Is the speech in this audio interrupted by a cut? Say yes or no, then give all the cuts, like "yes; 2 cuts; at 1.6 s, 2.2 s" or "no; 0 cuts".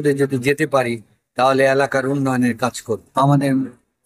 yes; 1 cut; at 3.0 s